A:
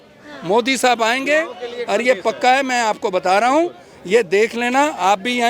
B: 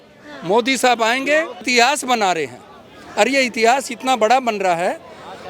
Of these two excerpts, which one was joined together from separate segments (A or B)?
B